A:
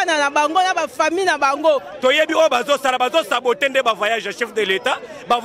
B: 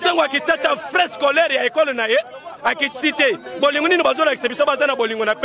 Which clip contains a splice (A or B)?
A